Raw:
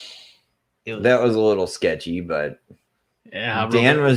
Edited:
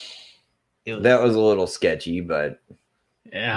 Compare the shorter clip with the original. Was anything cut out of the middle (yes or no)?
no